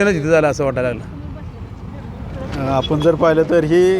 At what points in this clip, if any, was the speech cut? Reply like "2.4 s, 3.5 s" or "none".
none